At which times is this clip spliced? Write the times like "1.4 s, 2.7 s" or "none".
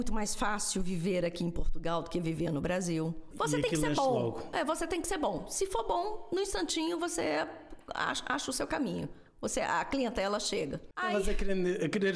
3.3 s, 10.9 s